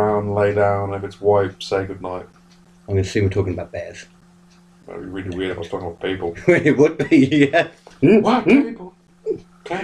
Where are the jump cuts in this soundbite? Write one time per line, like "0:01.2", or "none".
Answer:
0:07.8